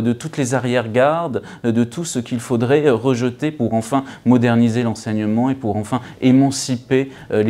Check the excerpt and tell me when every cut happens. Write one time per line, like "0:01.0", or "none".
none

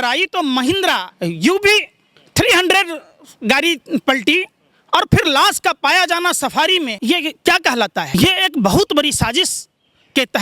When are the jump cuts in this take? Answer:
0:01.1
0:06.9
0:08.1

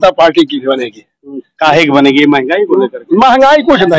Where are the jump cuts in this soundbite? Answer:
none

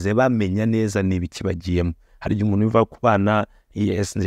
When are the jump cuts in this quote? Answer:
none

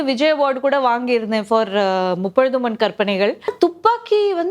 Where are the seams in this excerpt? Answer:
0:03.5

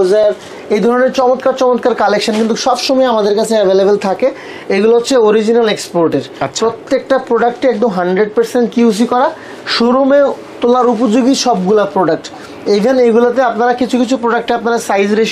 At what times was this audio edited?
none

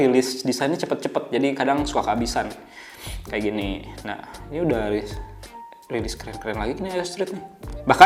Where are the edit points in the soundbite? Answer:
none

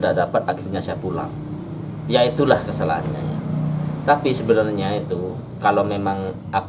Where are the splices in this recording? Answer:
none

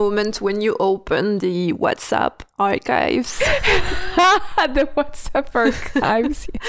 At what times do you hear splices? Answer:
none

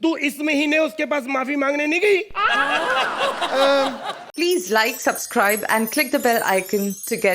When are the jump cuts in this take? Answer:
0:04.2

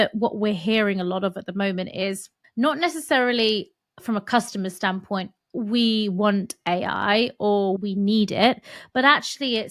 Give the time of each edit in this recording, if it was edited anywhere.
0:02.4
0:07.8

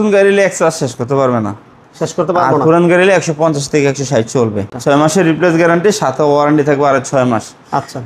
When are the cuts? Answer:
0:04.7

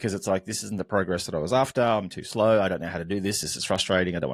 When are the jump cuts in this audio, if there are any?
none

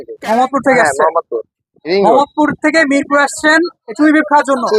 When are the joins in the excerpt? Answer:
none

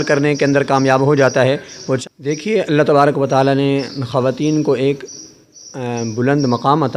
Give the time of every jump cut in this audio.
0:02.0

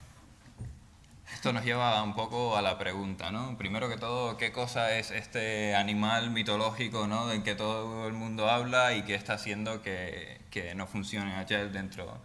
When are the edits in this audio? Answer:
0:08.3

